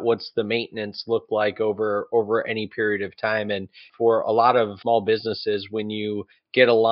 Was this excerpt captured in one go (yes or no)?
no